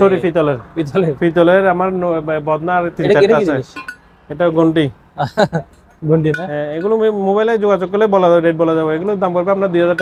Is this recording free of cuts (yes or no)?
yes